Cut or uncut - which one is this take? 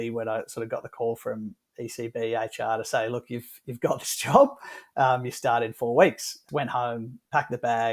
cut